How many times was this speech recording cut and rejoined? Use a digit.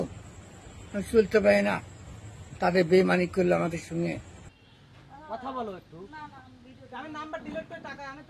1